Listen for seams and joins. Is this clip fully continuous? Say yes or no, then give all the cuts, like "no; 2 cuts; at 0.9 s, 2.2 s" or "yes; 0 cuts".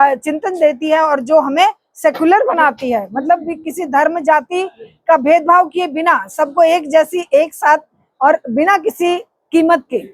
yes; 0 cuts